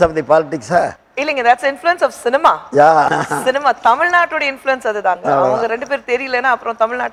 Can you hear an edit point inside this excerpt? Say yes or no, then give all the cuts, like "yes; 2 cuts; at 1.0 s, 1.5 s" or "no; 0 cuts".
no; 0 cuts